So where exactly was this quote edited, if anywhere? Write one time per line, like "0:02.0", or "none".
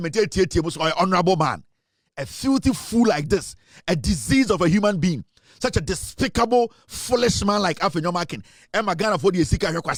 none